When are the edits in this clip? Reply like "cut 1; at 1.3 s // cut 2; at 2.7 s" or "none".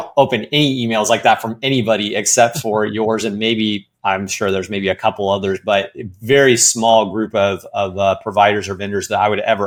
none